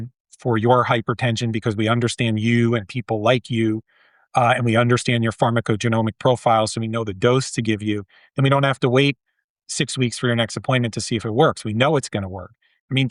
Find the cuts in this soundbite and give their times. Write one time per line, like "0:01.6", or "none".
none